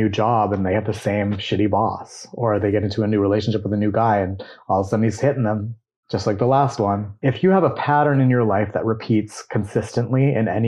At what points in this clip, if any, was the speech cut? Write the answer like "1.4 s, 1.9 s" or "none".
7.1 s